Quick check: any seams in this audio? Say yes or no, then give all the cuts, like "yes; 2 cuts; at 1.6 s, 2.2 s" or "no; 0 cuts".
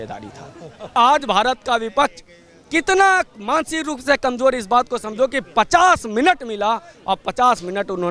yes; 1 cut; at 1.0 s